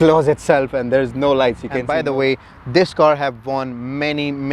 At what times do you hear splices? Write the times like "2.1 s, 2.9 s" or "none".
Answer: 1.9 s